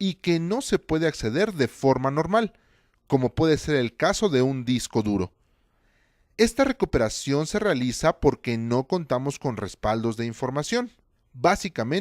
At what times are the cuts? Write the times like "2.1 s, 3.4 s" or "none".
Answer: 8.4 s